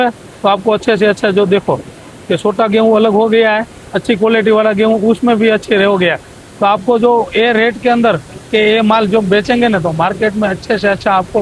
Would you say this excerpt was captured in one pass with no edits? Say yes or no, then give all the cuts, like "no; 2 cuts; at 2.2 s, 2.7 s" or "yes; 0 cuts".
yes; 0 cuts